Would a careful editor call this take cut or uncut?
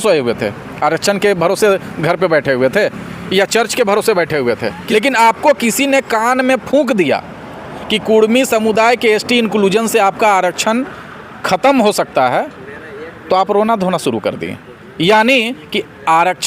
cut